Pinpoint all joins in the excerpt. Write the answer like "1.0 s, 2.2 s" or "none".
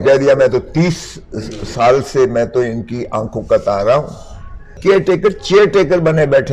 4.8 s